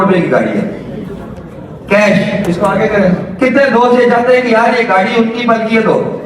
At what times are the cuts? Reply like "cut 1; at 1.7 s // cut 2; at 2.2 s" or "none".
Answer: cut 1; at 2.8 s